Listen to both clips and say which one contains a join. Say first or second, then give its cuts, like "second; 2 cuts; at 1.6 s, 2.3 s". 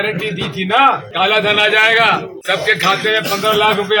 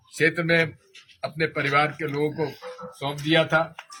first; 2 cuts; at 1.1 s, 2.3 s